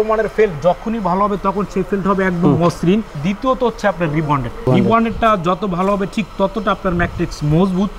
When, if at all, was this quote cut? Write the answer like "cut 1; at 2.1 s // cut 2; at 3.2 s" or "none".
cut 1; at 3.2 s // cut 2; at 4.7 s